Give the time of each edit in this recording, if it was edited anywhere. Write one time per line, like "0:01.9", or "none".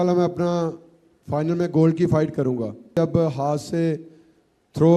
0:03.0